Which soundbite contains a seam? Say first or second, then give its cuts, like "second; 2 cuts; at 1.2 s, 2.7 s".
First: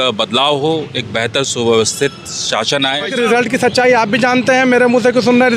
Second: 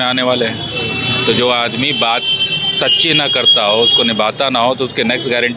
first; 1 cut; at 3.1 s